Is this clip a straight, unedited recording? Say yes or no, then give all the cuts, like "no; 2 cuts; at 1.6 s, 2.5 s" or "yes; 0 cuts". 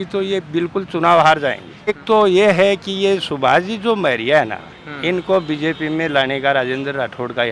no; 1 cut; at 2.0 s